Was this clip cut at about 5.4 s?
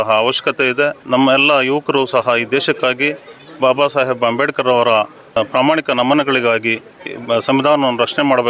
yes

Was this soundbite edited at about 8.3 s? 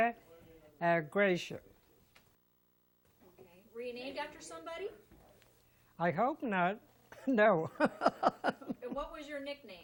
no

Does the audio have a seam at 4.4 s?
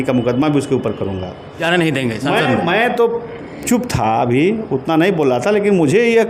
no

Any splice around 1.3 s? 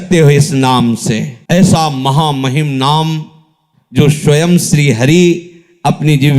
yes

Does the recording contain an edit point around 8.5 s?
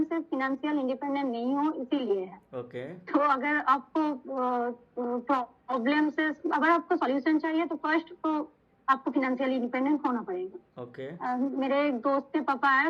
no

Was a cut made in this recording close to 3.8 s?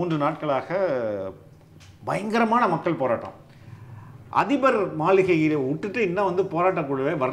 no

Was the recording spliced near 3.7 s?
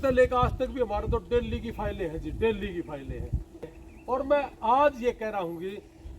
yes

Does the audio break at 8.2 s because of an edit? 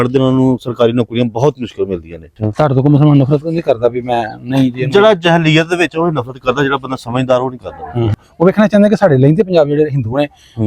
yes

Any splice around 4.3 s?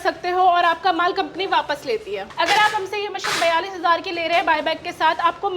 no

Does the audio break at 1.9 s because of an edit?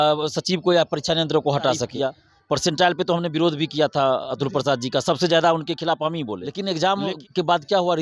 yes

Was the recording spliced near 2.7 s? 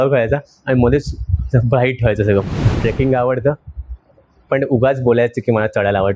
yes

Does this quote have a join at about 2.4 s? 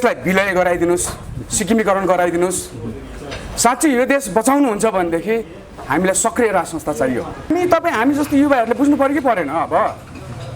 no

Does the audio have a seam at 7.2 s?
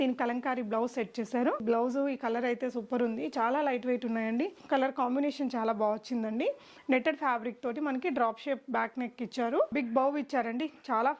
no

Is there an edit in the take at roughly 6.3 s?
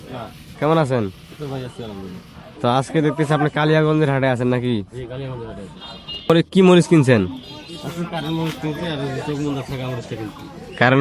yes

